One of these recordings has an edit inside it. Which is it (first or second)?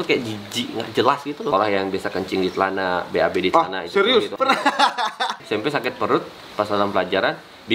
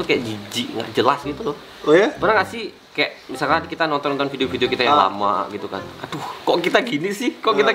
first